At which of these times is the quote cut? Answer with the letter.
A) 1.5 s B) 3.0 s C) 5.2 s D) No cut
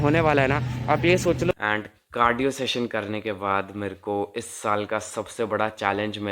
A